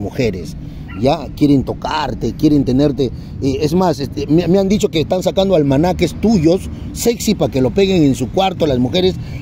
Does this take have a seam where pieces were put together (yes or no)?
no